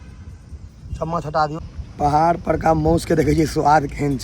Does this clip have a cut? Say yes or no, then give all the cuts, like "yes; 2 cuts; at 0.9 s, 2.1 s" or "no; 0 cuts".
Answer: yes; 1 cut; at 1.6 s